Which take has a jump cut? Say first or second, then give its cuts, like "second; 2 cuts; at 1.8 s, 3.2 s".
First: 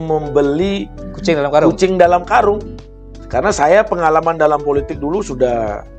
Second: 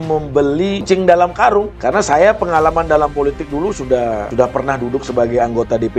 second; 3 cuts; at 0.8 s, 1.7 s, 4.3 s